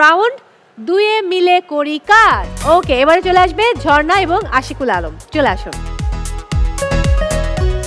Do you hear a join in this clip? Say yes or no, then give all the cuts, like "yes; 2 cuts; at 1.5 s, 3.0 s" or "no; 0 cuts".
yes; 1 cut; at 2.5 s